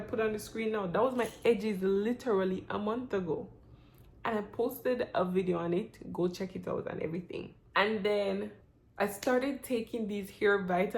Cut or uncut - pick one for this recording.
uncut